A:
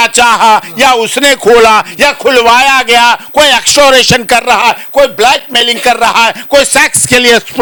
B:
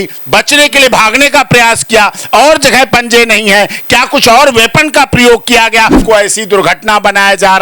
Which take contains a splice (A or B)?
B